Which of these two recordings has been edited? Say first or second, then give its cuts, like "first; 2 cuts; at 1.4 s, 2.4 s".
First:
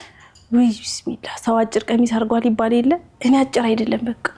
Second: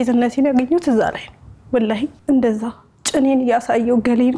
second; 1 cut; at 2.2 s